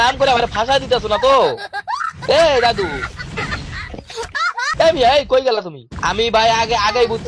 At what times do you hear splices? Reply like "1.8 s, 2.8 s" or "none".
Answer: 5.8 s

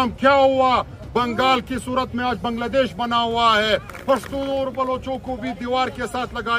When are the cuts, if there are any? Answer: 3.9 s

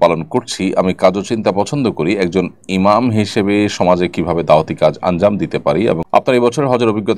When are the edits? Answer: 6.0 s

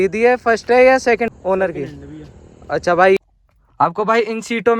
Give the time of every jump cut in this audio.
1.3 s, 3.2 s

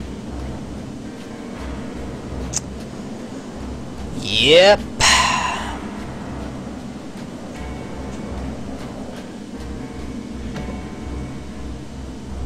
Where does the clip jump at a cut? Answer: 9.8 s

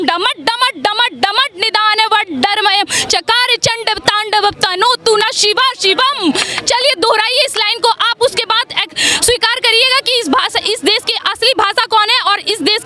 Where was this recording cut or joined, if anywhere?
none

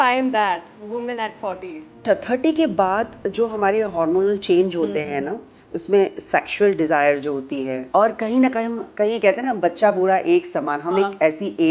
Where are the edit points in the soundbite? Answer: 2.0 s, 7.8 s

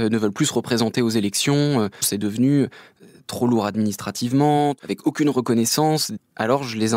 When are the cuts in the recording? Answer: 2.1 s, 4.8 s, 6.1 s

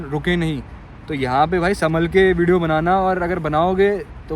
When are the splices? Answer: none

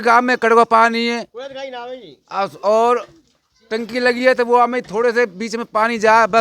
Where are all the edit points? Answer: none

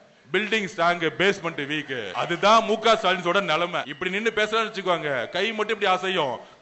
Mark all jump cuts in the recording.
2.1 s, 3.9 s

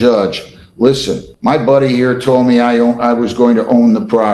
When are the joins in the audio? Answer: 1.3 s

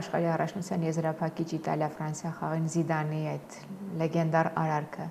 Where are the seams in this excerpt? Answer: none

